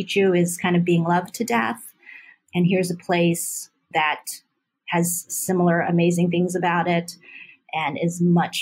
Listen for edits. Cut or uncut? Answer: cut